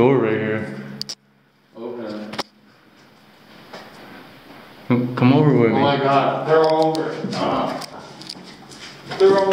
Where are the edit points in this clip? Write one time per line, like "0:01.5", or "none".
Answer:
none

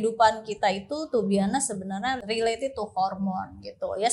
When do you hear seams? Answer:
0:02.2

